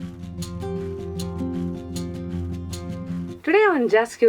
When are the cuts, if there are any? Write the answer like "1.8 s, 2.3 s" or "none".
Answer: none